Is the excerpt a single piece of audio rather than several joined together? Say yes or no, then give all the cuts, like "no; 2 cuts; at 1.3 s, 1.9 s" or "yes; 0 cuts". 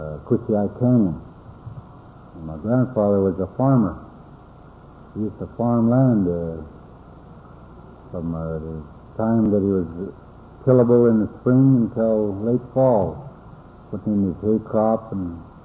yes; 0 cuts